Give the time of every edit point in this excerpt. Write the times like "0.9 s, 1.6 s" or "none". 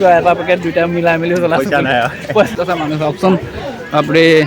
2.5 s